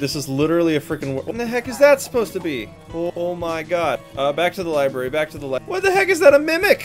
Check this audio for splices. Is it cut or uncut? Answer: cut